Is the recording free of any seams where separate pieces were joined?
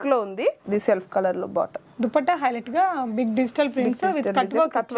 yes; 0 cuts

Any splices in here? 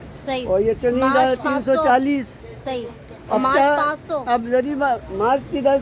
no; 0 cuts

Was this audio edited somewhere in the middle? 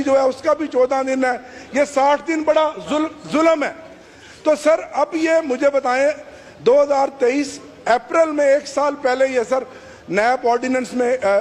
no; 0 cuts

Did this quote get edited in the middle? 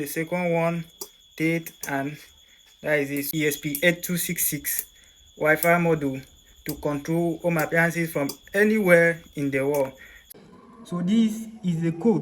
yes; 2 cuts; at 3.3 s, 10.3 s

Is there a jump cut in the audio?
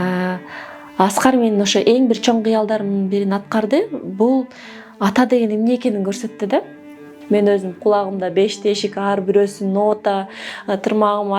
yes; 1 cut; at 7.1 s

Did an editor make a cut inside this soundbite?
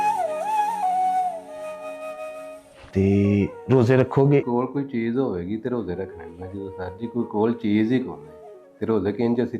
yes; 1 cut; at 2.9 s

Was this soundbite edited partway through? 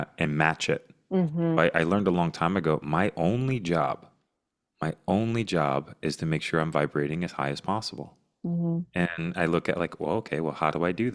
yes; 1 cut; at 1.6 s

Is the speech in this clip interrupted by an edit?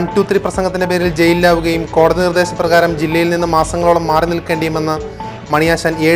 no; 0 cuts

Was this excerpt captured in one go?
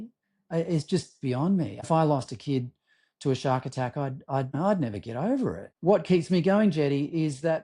no; 3 cuts; at 1.8 s, 4.6 s, 5.7 s

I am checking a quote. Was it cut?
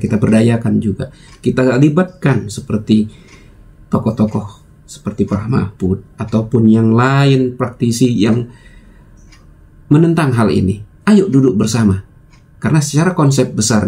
no; 0 cuts

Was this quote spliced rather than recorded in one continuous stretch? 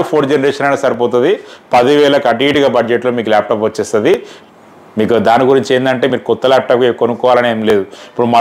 yes; 1 cut; at 4.3 s

